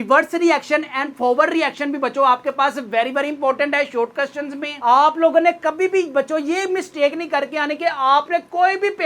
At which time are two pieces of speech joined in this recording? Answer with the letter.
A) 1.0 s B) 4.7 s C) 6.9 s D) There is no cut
B